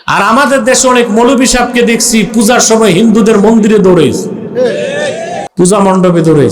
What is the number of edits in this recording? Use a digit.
1